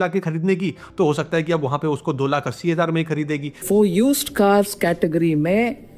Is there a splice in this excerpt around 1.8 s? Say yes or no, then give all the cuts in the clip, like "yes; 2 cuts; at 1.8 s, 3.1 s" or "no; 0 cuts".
no; 1 cut; at 3.6 s